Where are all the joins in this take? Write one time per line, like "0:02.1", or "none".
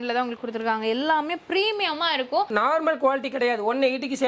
0:02.5